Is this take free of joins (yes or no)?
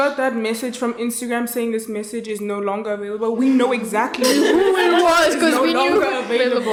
yes